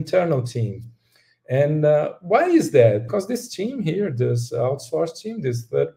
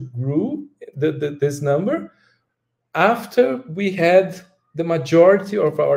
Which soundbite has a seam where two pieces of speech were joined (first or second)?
first